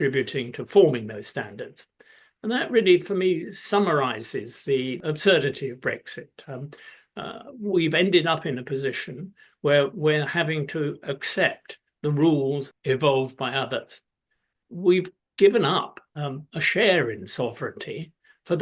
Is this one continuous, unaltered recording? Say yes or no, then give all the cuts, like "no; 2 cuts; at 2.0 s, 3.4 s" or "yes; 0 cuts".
no; 2 cuts; at 5.0 s, 12.7 s